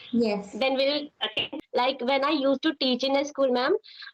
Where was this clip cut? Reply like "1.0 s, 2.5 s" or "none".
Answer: 1.5 s